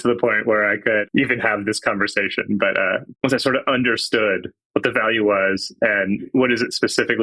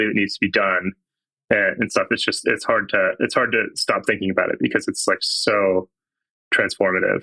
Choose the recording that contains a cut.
first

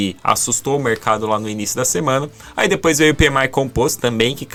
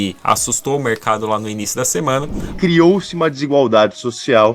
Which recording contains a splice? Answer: second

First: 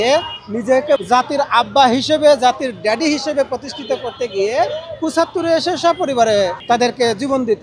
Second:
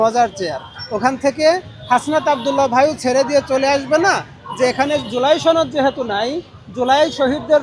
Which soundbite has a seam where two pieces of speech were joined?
first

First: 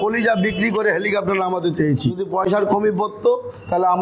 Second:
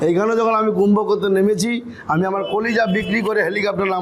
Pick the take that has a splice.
first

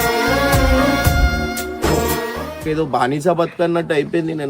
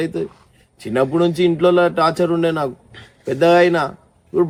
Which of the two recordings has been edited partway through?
first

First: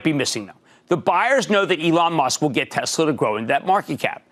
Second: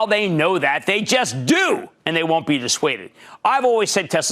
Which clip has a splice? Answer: second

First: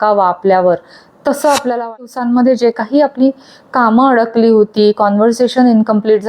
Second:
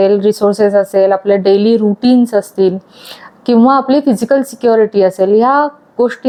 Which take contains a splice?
first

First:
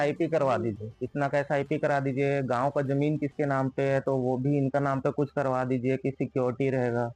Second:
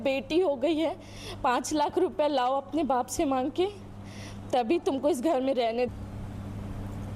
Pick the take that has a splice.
second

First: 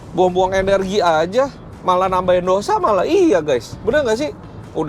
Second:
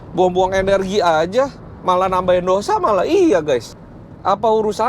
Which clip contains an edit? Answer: second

